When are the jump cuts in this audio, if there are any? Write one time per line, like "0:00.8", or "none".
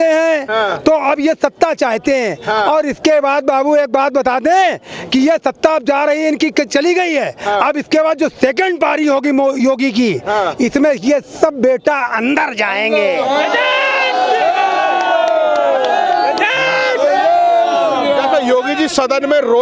none